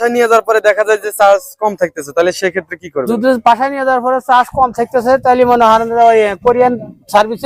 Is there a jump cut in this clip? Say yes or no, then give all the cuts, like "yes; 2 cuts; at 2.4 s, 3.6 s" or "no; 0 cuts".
no; 0 cuts